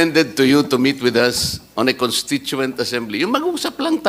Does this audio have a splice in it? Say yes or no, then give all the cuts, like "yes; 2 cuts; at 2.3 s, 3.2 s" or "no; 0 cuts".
no; 0 cuts